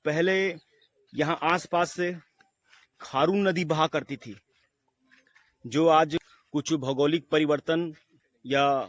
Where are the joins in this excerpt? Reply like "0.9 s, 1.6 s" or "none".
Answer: 6.2 s